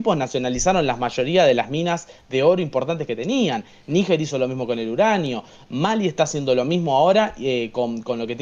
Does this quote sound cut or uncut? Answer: uncut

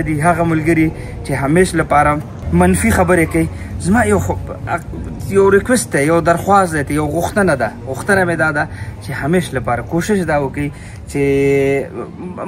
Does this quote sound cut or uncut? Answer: uncut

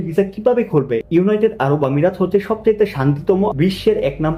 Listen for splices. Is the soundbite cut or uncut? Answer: uncut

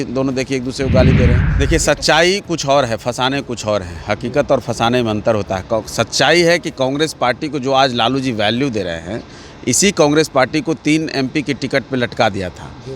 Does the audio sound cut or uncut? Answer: cut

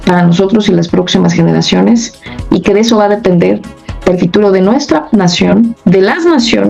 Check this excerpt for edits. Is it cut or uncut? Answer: uncut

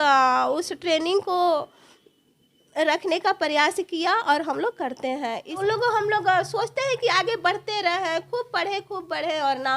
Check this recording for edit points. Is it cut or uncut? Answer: cut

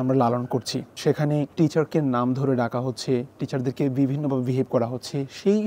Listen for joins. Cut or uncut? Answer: cut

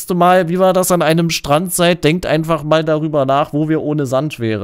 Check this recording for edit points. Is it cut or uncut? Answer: uncut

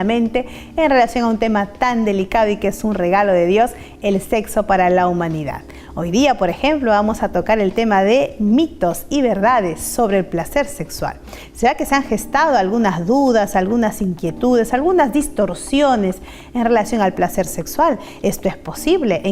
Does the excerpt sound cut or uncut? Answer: cut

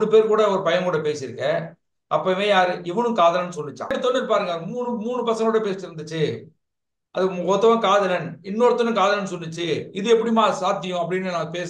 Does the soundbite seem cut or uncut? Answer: cut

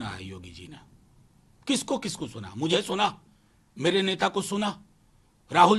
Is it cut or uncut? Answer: uncut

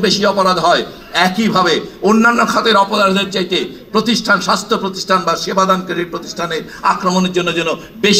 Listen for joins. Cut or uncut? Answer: uncut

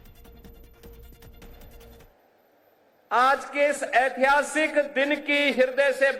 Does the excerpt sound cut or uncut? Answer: uncut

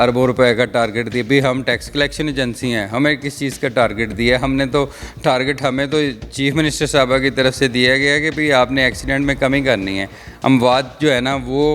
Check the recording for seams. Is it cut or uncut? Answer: uncut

